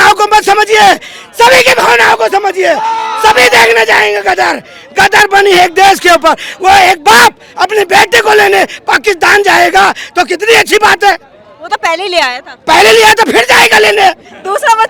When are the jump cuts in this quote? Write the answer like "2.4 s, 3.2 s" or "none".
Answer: none

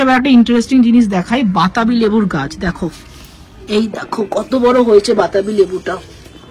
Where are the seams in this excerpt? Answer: none

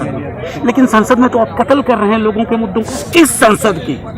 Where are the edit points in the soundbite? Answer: 3.0 s

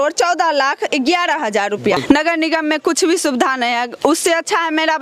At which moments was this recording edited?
2.0 s

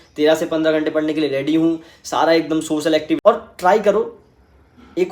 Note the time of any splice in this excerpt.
3.2 s

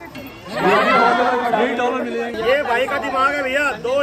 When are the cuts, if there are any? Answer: 2.3 s

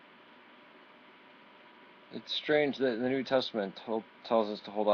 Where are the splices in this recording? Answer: none

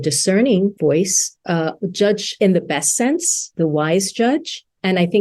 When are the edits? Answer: 0.8 s, 2.3 s, 3.5 s

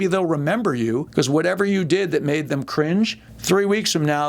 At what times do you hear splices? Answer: 1.1 s, 3.3 s

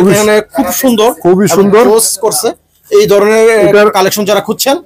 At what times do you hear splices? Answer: none

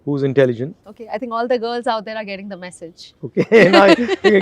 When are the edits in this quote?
0.9 s

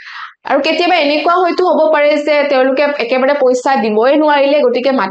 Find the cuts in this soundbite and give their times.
none

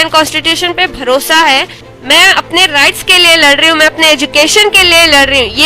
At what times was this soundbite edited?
1.8 s

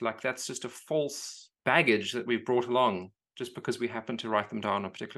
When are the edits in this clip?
none

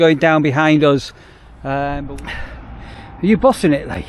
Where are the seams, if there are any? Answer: 2.1 s

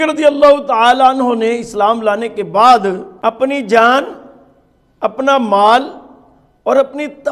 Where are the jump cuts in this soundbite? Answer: none

